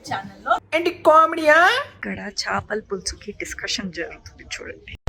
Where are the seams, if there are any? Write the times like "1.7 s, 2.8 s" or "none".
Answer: 1.9 s